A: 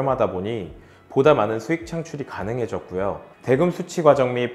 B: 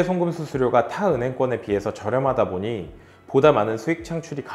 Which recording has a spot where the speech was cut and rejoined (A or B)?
A